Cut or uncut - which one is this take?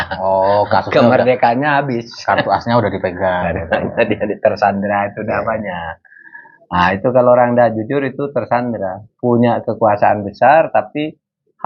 uncut